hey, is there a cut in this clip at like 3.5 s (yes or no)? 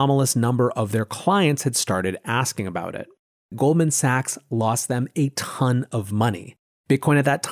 yes